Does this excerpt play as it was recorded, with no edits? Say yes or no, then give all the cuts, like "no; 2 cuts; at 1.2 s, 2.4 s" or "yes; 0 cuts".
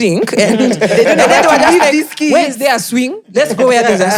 yes; 0 cuts